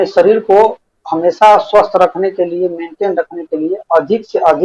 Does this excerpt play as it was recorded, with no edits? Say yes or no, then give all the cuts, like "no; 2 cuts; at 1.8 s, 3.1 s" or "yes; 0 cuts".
yes; 0 cuts